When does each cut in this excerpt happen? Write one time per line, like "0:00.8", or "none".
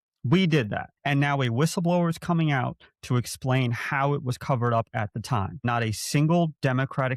0:00.9
0:05.7